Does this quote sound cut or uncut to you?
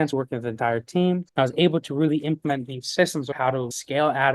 cut